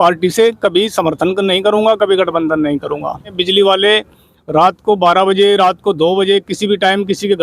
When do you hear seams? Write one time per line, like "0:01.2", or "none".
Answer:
0:03.4

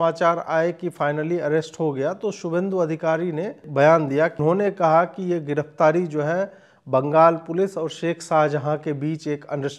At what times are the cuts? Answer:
0:03.7
0:04.4

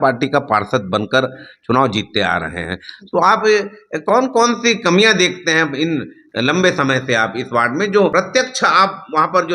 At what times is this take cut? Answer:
0:08.1

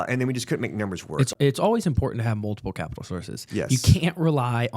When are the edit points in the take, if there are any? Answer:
0:01.3

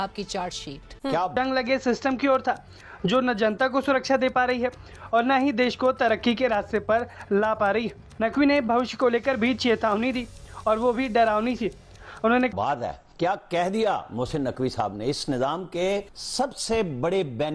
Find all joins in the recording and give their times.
0:01.4
0:12.5

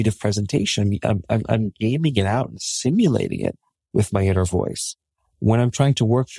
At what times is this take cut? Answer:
none

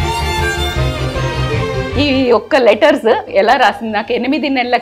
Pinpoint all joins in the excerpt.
0:01.6
0:03.2

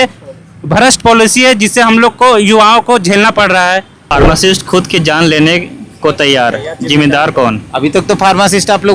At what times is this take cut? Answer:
0:04.0

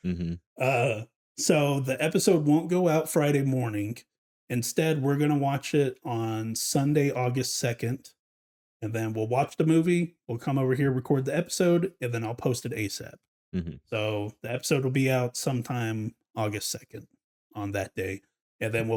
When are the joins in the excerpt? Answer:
none

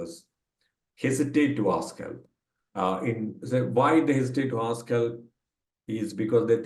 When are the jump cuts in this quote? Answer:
none

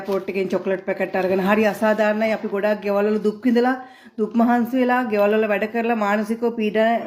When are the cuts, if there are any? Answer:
none

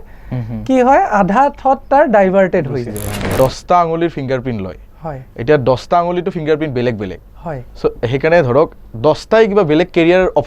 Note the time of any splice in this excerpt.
0:03.3

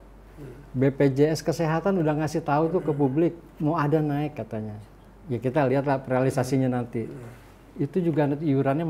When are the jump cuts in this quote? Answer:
none

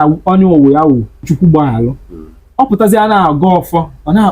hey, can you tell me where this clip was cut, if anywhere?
0:01.3

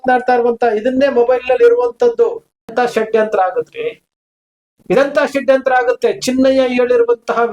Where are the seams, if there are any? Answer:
0:02.7

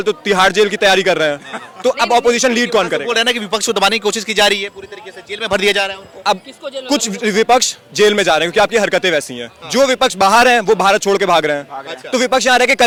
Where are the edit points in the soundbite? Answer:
none

